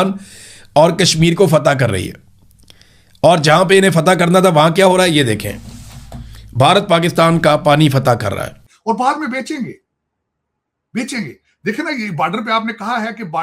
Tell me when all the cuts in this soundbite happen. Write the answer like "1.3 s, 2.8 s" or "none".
8.7 s